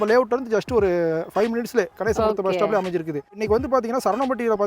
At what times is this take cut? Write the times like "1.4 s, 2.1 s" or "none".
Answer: 3.4 s